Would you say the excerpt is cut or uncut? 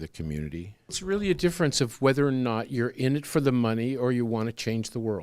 cut